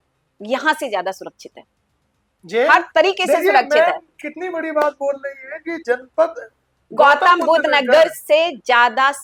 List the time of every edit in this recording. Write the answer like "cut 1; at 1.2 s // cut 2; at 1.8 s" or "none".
none